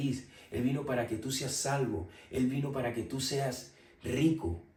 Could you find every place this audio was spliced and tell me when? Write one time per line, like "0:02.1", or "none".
none